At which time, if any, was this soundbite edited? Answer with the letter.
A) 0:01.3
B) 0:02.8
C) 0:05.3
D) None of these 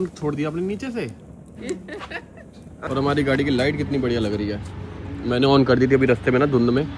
B